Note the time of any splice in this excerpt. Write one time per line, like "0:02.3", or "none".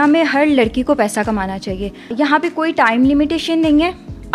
0:02.1